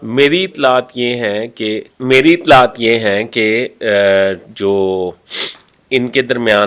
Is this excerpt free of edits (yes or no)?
yes